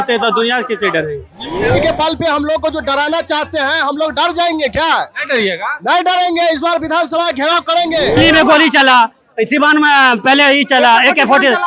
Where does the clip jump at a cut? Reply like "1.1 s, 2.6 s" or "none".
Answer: 1.8 s, 8.2 s

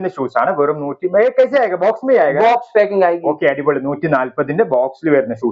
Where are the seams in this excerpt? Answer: none

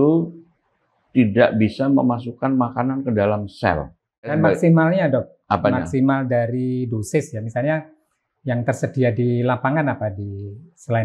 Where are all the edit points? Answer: 4.3 s

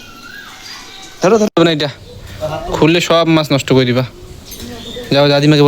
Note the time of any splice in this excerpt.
1.5 s

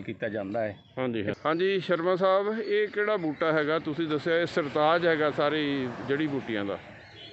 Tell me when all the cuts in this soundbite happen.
1.3 s

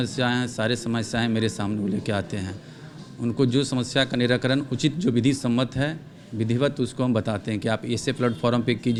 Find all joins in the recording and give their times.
none

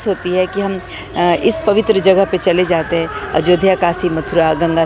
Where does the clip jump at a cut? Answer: none

